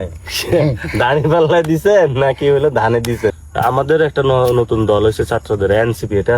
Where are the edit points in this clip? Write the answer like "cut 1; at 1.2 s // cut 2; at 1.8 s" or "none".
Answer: cut 1; at 3.4 s